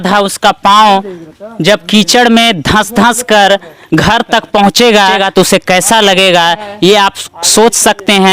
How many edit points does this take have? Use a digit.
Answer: 1